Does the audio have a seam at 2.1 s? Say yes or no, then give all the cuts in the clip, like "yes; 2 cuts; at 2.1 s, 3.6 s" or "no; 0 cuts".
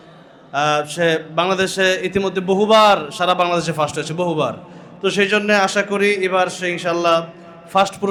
no; 0 cuts